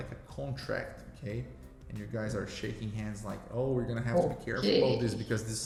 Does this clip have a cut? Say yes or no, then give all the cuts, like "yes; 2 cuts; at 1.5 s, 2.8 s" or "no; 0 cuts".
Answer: no; 0 cuts